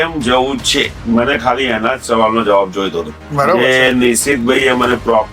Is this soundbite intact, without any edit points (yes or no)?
no